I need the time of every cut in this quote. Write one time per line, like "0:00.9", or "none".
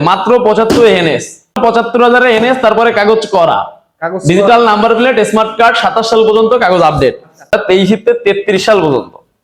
0:01.6
0:07.5

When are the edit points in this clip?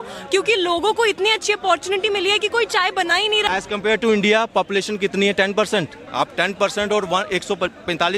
0:03.5
0:06.0

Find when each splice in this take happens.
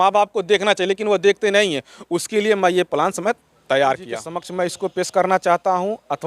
0:04.4

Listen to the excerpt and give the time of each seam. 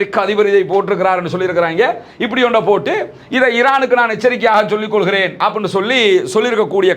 none

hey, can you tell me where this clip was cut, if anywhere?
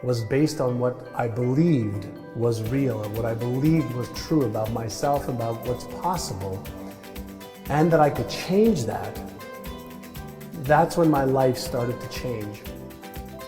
0:12.5

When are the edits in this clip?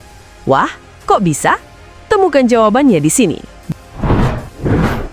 0:03.5

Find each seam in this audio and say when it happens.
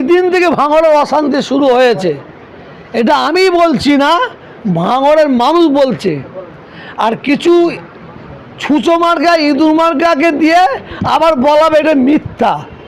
none

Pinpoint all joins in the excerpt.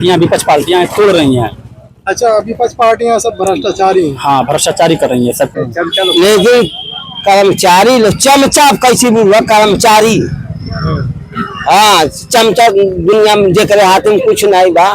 0:05.5

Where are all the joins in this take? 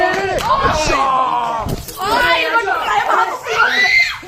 none

